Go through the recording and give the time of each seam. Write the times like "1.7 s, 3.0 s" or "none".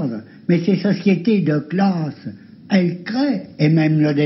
none